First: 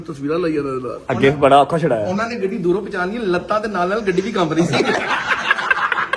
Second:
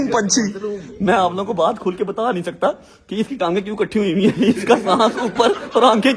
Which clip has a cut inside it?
first; 1 cut; at 5.1 s

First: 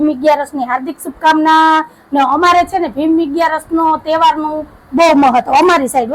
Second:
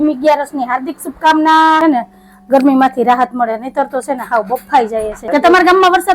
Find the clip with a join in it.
second; 2 cuts; at 1.8 s, 5.1 s

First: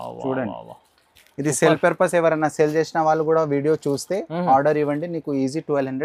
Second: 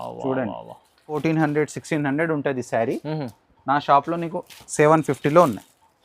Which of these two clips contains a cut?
second; 1 cut; at 1.2 s

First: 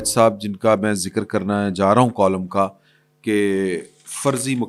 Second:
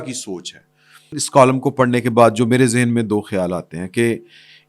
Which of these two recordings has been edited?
second; 1 cut; at 1.2 s

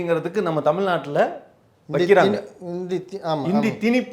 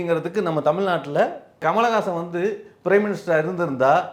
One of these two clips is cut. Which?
second; 1 cut; at 1.6 s

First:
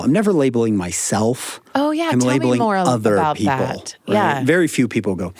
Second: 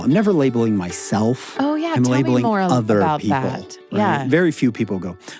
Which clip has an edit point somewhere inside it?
second; 1 cut; at 1.5 s

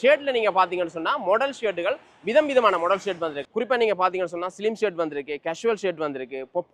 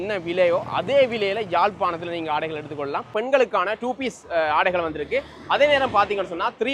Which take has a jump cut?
second; 1 cut; at 3.1 s

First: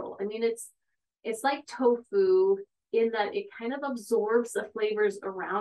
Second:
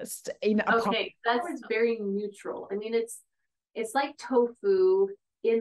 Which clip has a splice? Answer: second; 1 cut; at 1.5 s

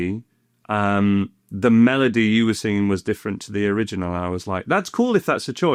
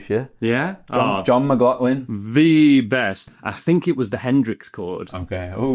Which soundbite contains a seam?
second; 1 cut; at 3.1 s

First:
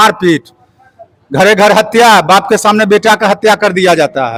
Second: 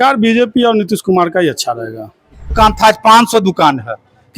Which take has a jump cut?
second; 1 cut; at 2.5 s

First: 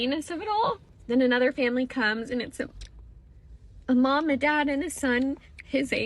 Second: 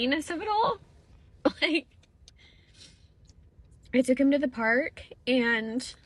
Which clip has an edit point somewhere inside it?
first; 1 cut; at 0.9 s

